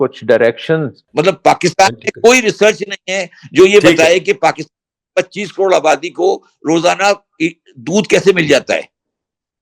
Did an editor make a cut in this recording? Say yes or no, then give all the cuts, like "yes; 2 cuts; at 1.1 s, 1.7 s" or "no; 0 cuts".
yes; 1 cut; at 1.0 s